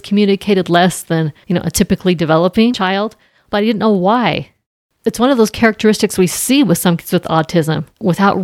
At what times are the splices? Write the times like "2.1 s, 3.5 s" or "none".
1.4 s, 2.8 s